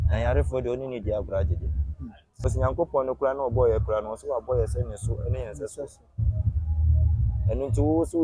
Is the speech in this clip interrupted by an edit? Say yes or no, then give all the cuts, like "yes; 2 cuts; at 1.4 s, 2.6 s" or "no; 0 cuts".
yes; 1 cut; at 2.5 s